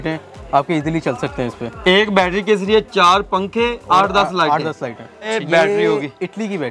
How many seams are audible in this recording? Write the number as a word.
one